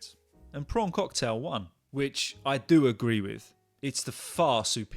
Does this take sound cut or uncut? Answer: cut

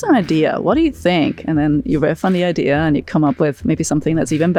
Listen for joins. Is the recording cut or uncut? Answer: uncut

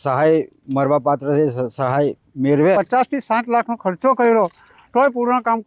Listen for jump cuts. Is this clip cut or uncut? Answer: cut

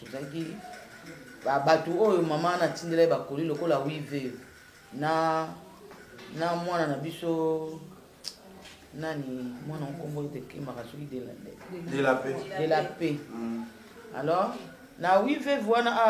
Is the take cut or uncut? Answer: uncut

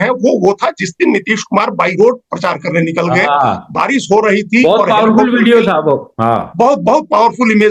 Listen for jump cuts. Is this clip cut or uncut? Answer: uncut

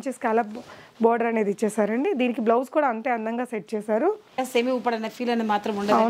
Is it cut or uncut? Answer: cut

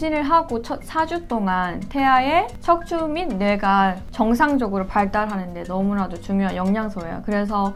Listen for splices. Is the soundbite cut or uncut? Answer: uncut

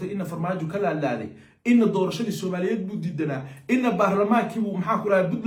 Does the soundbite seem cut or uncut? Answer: uncut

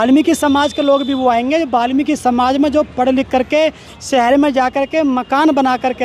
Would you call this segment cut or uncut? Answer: uncut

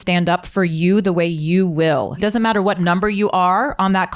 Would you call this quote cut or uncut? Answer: cut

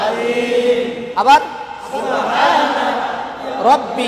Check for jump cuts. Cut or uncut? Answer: uncut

